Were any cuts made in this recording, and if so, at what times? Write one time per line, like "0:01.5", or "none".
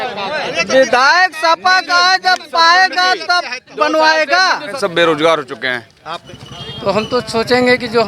0:04.7
0:06.1